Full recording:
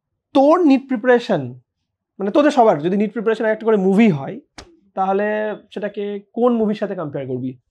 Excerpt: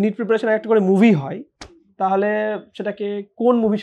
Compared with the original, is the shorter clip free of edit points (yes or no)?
yes